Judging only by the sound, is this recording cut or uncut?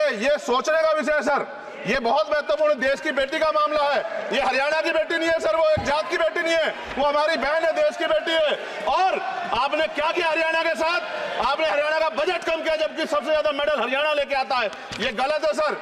uncut